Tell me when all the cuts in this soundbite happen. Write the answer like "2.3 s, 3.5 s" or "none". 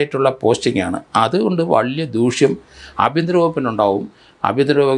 none